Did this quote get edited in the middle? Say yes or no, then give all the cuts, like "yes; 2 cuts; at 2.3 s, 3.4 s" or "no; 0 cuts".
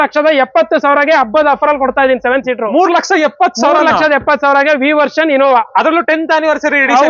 no; 0 cuts